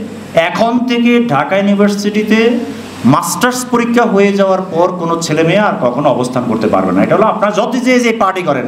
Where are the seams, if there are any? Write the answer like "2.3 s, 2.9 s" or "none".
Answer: none